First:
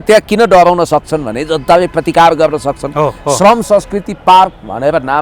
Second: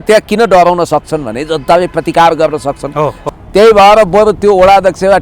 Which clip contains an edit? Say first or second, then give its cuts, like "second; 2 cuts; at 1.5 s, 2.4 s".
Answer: second; 1 cut; at 3.3 s